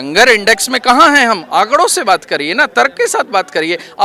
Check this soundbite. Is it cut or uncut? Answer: uncut